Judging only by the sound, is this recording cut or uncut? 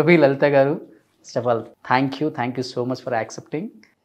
cut